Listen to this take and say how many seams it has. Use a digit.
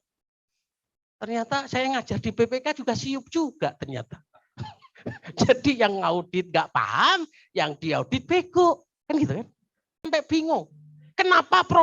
1